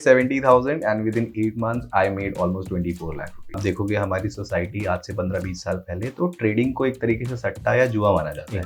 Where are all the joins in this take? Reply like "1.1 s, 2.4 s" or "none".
3.6 s